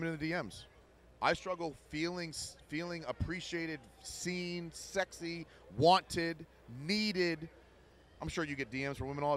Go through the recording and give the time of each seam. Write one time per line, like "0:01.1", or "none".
none

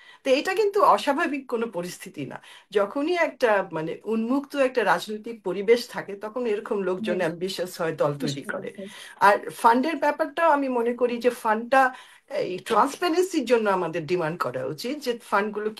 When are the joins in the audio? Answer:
none

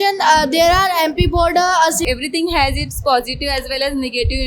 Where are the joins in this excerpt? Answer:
0:02.0

